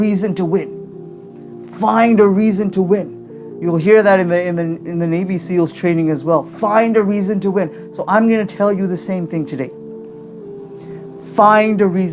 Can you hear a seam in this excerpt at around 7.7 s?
no; 2 cuts; at 9.9 s, 11.2 s

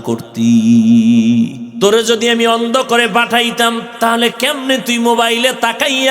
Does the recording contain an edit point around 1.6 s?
yes; 1 cut; at 1.6 s

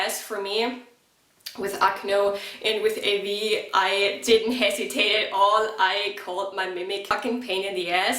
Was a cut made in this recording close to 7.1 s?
yes; 1 cut; at 7.1 s

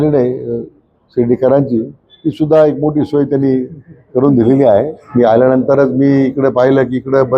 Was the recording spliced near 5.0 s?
yes; 1 cut; at 5.0 s

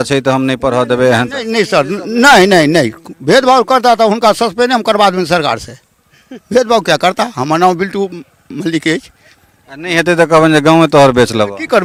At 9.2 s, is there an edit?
no; 0 cuts

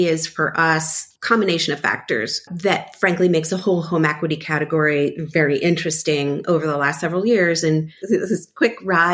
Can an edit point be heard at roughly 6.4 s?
no; 3 cuts; at 1.0 s, 2.5 s, 8.0 s

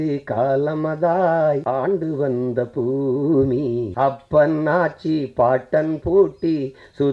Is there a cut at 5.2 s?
no; 2 cuts; at 1.6 s, 3.9 s

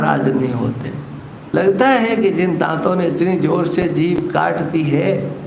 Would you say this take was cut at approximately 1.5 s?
yes; 1 cut; at 1.5 s

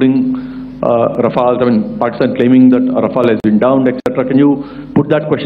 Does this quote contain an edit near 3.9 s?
no; 0 cuts

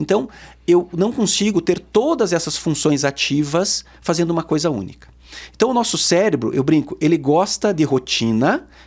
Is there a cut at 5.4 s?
no; 0 cuts

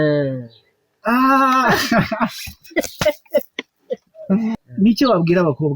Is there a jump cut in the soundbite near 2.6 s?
no; 1 cut; at 4.6 s

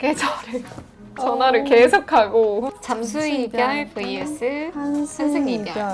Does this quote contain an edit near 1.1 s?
yes; 2 cuts; at 1.1 s, 2.7 s

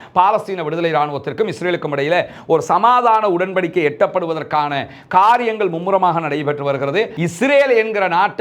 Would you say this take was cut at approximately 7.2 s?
yes; 1 cut; at 7.2 s

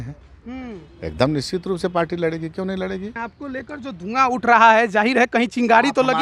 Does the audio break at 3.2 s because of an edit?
yes; 1 cut; at 3.2 s

